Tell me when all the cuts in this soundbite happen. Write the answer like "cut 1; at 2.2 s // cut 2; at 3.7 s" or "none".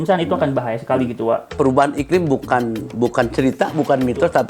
cut 1; at 1.5 s